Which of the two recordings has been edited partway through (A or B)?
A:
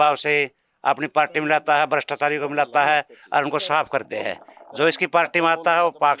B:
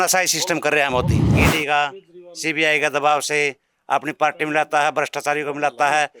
B